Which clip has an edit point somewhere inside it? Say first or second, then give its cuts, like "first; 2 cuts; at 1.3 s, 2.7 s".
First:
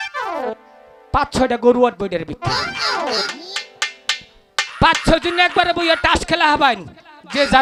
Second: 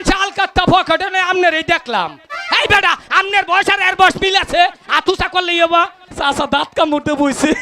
second; 1 cut; at 6.1 s